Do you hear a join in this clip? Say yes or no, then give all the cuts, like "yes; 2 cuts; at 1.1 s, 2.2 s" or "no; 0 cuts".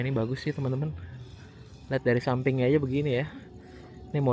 no; 0 cuts